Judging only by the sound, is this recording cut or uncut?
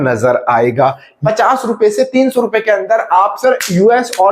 cut